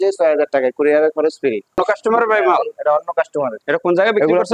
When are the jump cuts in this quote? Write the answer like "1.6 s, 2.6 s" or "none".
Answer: 1.8 s